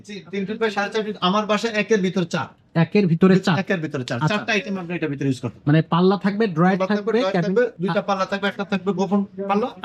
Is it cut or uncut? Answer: uncut